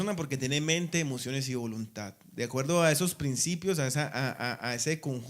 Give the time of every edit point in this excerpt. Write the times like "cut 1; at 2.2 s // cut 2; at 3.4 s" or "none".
cut 1; at 1.7 s